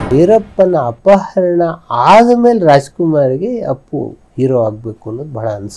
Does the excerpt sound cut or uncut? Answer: uncut